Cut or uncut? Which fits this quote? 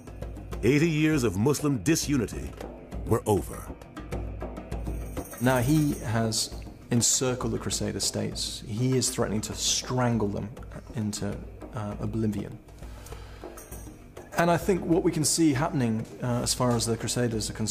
cut